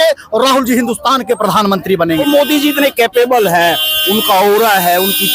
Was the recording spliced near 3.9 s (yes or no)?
no